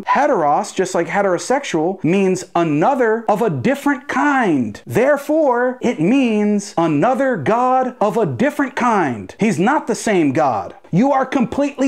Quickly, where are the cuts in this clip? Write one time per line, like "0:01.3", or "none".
none